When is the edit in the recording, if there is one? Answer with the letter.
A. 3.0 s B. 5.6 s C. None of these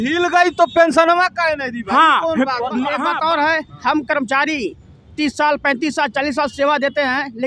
A